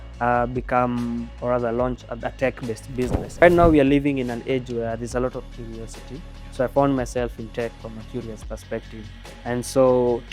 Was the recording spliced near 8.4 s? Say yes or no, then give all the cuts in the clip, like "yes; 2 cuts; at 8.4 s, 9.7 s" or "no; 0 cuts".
no; 1 cut; at 3.4 s